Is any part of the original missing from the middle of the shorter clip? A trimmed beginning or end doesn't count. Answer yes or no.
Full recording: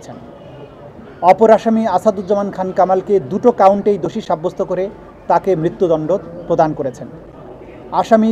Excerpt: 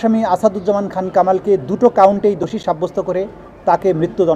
no